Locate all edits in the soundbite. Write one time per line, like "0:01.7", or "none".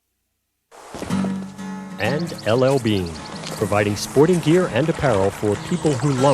0:02.0